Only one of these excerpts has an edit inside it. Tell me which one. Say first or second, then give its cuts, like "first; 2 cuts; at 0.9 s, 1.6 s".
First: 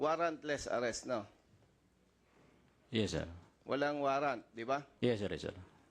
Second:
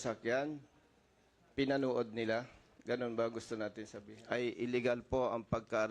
second; 1 cut; at 4.4 s